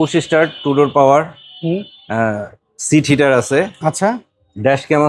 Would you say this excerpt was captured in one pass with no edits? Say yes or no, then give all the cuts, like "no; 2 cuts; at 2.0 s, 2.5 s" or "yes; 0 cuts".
yes; 0 cuts